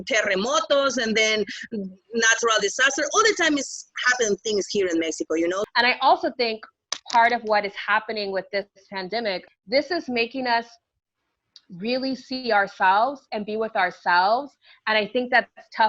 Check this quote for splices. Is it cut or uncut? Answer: cut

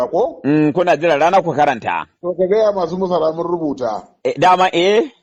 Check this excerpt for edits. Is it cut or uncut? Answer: uncut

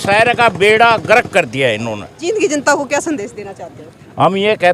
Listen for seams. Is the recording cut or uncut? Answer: cut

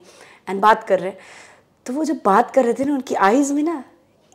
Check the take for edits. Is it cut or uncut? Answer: uncut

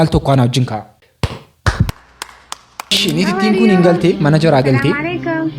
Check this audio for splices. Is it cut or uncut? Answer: cut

